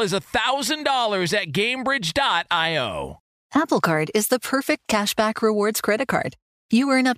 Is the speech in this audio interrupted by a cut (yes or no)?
yes